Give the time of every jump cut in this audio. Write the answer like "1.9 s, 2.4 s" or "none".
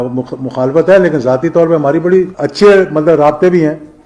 2.4 s

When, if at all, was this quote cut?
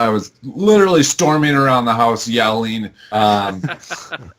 3.0 s

